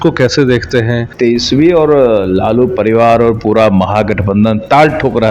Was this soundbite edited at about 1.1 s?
yes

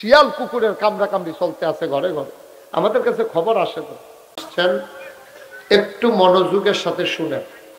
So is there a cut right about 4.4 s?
yes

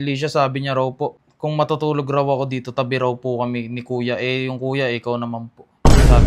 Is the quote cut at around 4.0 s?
no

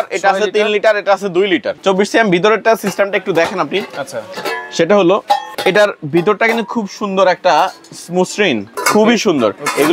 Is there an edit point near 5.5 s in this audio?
yes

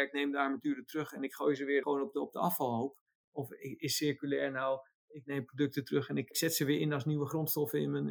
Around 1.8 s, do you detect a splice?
yes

